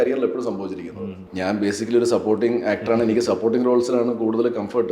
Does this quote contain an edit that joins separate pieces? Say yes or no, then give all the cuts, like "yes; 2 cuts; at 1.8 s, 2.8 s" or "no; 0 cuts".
yes; 1 cut; at 1.3 s